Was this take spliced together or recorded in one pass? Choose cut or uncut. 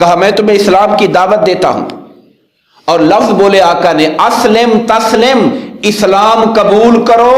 uncut